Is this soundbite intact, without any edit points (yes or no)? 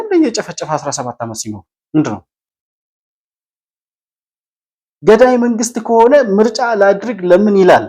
yes